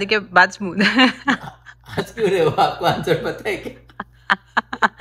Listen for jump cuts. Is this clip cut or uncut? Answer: uncut